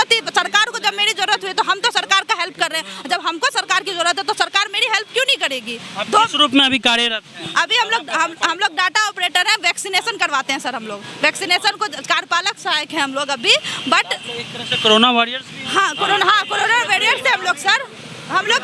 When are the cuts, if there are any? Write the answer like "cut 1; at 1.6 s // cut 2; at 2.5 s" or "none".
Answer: none

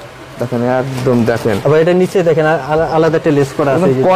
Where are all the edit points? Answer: none

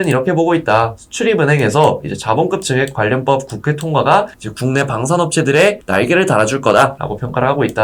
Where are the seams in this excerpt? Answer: none

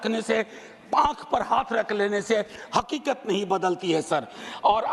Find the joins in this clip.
none

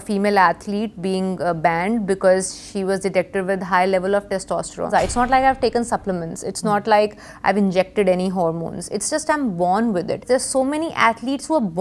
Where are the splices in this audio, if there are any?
cut 1; at 4.9 s // cut 2; at 10.2 s

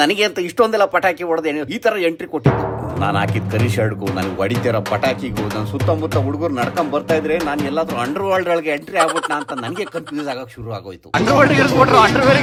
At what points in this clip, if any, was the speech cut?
none

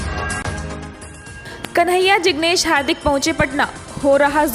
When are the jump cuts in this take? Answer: cut 1; at 1.0 s

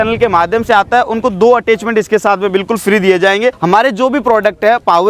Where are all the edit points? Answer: cut 1; at 3.6 s

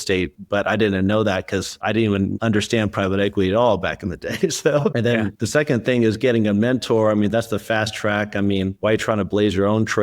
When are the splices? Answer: cut 1; at 5.2 s

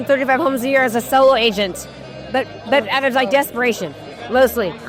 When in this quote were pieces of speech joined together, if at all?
none

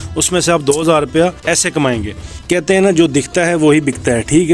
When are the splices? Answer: cut 1; at 1.4 s // cut 2; at 2.4 s

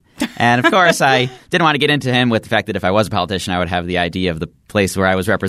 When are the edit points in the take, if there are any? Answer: none

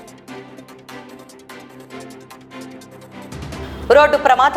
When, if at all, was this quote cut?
cut 1; at 1.7 s // cut 2; at 2.4 s

